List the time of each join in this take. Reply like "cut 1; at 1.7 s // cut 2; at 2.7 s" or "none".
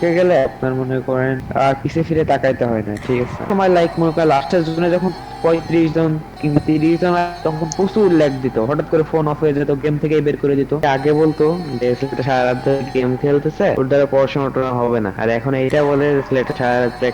cut 1; at 3.5 s // cut 2; at 10.8 s // cut 3; at 13.8 s // cut 4; at 15.1 s